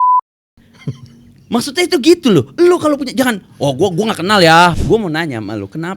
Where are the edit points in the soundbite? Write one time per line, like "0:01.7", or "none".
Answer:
0:04.8